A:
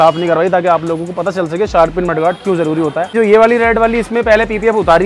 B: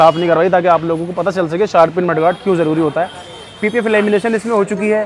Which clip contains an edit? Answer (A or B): A